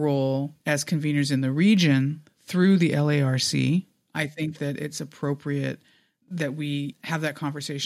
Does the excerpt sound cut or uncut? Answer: cut